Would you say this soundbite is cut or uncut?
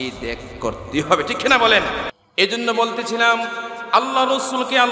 cut